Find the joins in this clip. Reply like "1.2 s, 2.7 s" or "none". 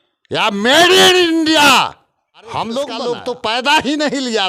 3.0 s